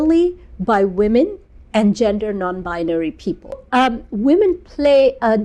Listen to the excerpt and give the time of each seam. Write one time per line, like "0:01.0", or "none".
0:03.6